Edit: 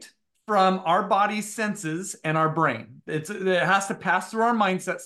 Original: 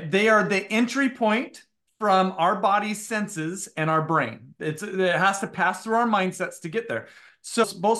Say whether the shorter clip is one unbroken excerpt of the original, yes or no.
yes